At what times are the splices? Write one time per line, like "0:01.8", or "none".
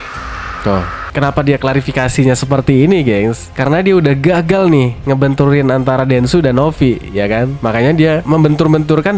0:01.1